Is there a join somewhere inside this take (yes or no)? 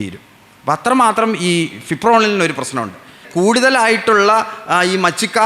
yes